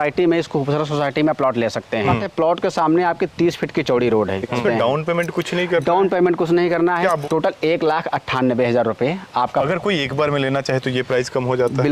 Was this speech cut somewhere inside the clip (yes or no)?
yes